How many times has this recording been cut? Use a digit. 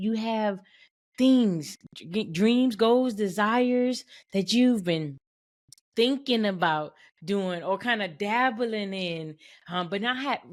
0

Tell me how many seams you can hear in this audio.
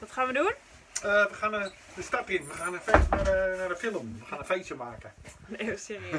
0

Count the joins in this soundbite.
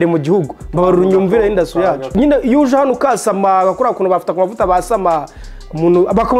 1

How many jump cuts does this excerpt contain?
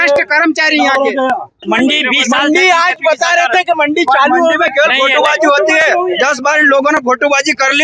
1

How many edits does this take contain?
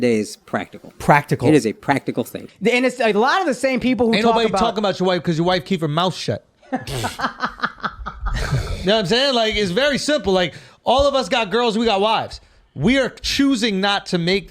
1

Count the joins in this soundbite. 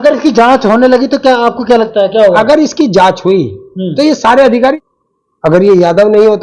1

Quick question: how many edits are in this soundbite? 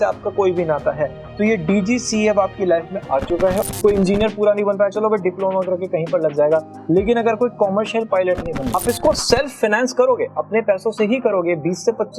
2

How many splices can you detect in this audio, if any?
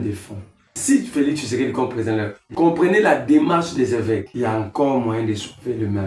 3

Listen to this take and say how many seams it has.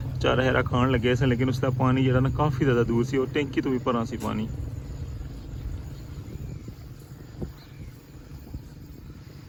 0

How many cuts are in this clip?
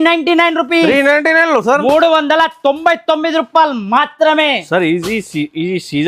0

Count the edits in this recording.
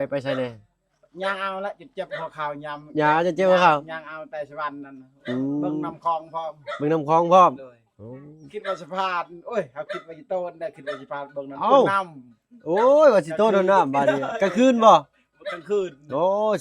0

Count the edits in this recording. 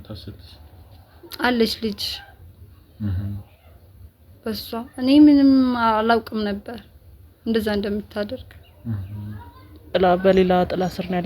1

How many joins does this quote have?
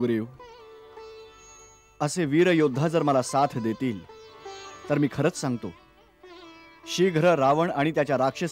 0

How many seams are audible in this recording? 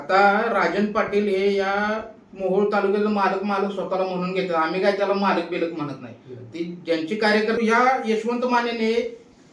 1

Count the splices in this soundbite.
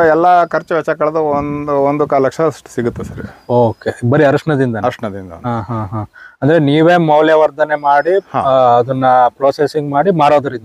0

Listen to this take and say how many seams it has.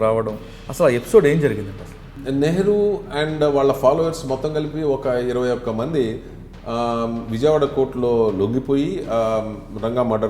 1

